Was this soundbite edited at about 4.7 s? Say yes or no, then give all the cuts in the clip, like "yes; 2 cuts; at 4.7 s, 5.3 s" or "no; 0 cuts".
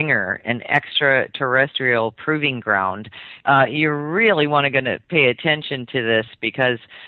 yes; 1 cut; at 4.7 s